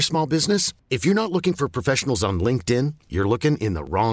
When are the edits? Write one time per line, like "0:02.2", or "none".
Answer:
none

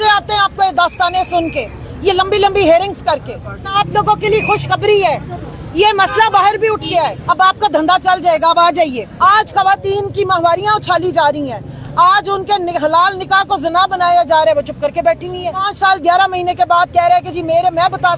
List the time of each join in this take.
0:03.7
0:07.2
0:09.1
0:15.7

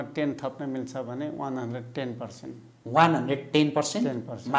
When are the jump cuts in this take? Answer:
none

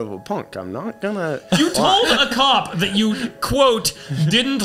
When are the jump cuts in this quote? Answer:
none

